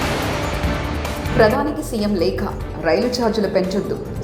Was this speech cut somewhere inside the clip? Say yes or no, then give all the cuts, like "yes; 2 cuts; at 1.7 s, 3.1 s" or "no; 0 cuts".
yes; 1 cut; at 1.3 s